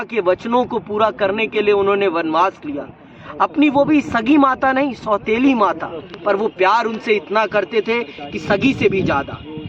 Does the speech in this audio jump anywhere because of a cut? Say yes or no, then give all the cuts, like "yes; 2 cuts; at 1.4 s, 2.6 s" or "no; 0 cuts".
no; 0 cuts